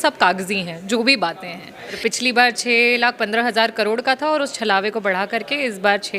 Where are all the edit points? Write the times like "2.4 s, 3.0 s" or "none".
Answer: 2.0 s